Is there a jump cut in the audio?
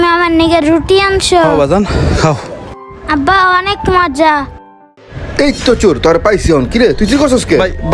no; 0 cuts

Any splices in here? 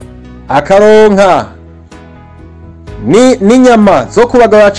yes; 2 cuts; at 1.6 s, 3.0 s

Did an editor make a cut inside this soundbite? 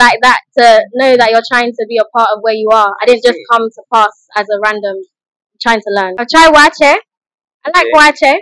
yes; 1 cut; at 6.2 s

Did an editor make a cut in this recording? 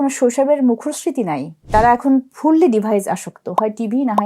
yes; 1 cut; at 1.6 s

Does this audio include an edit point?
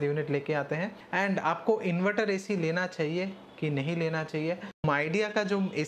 yes; 2 cuts; at 1.0 s, 4.8 s

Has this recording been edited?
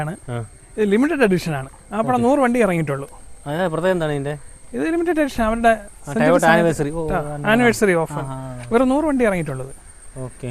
no; 0 cuts

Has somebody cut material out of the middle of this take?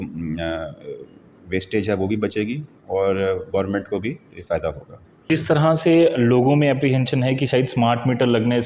yes; 1 cut; at 5.3 s

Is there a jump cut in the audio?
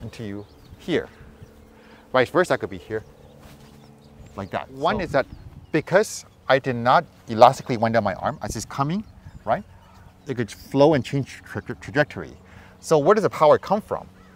yes; 1 cut; at 4.7 s

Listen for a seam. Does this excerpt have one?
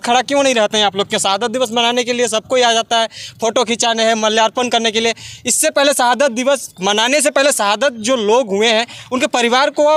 no; 0 cuts

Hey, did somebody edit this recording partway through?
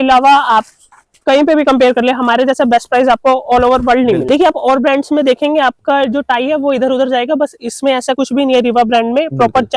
yes; 1 cut; at 4.2 s

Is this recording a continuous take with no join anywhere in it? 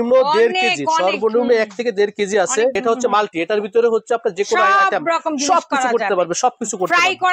no; 1 cut; at 2.8 s

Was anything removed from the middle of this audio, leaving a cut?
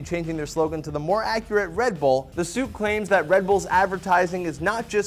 yes; 1 cut; at 2.3 s

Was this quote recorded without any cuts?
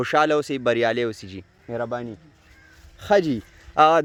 yes; 0 cuts

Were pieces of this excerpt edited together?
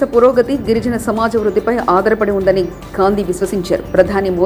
no; 0 cuts

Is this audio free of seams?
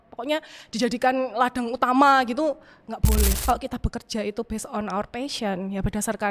no; 1 cut; at 3.4 s

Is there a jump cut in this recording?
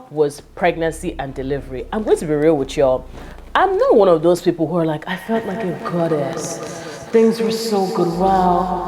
no; 0 cuts

